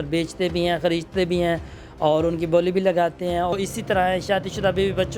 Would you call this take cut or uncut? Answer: cut